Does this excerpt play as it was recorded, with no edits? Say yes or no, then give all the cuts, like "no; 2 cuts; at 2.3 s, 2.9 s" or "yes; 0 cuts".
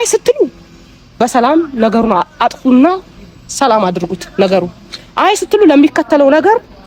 yes; 0 cuts